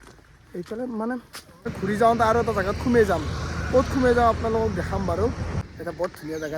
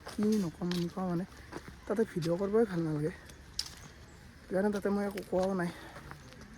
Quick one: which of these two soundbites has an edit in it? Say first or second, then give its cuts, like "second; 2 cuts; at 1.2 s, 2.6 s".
first; 2 cuts; at 1.7 s, 5.5 s